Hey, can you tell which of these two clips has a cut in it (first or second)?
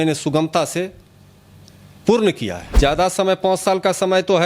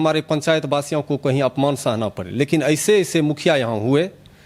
first